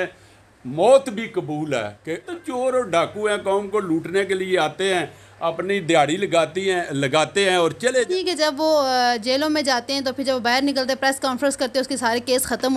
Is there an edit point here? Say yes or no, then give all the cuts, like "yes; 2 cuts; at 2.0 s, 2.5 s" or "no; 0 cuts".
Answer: yes; 2 cuts; at 2.3 s, 8.1 s